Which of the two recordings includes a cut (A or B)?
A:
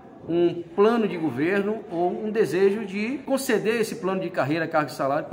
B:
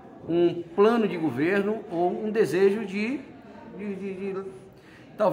A